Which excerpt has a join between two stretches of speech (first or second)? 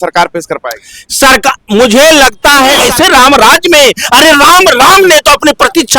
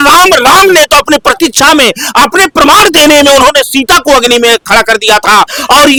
first